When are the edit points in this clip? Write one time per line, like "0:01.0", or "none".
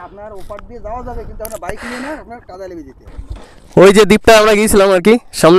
0:03.1